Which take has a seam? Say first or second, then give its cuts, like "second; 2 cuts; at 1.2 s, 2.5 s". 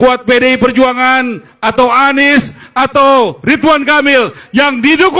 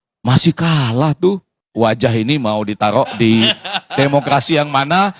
second; 1 cut; at 1.6 s